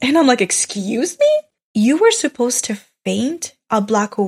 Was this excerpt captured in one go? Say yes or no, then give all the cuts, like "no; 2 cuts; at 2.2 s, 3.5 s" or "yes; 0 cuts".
no; 1 cut; at 1.6 s